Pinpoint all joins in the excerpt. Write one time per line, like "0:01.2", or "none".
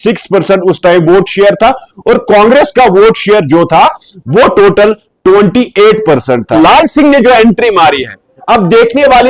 0:06.5